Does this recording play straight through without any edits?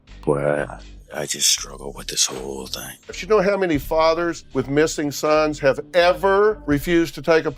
no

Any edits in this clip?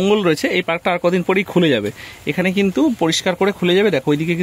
no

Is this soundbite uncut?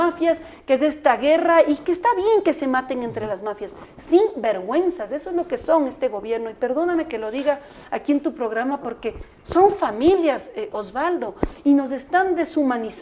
yes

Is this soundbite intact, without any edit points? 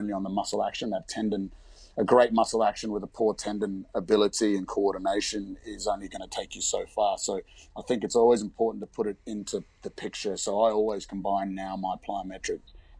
yes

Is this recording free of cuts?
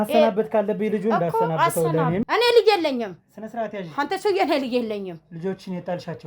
no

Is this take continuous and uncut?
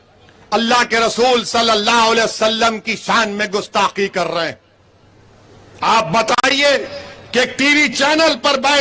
yes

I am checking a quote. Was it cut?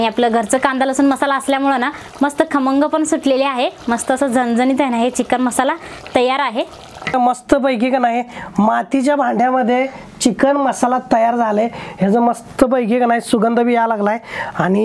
yes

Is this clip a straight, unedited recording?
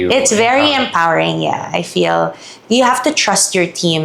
yes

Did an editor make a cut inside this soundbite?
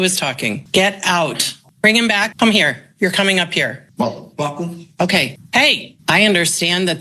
yes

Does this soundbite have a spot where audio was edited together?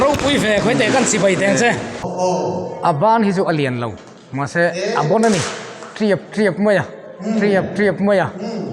yes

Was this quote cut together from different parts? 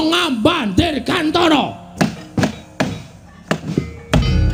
no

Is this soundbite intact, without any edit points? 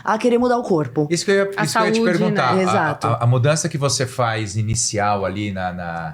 yes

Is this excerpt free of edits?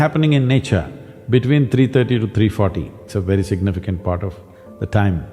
no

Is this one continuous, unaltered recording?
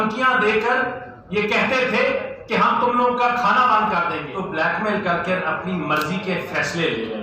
no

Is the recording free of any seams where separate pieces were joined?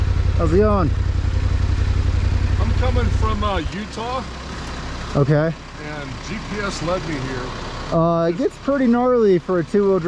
yes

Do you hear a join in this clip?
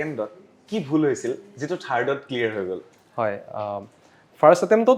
no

